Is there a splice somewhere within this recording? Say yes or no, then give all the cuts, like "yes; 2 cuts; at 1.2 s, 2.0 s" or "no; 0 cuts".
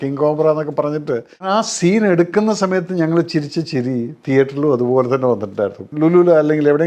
yes; 2 cuts; at 1.4 s, 5.8 s